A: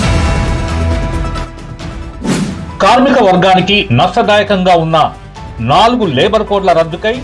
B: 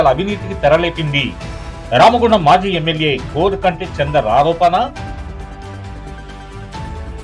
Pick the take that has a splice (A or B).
A